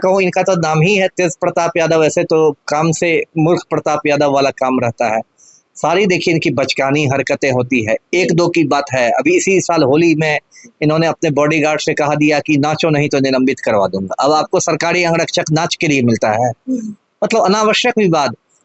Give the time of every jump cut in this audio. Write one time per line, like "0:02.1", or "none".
none